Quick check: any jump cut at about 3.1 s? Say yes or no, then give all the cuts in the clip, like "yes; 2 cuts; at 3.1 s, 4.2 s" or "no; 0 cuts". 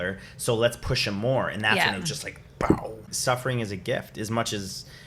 yes; 1 cut; at 3.1 s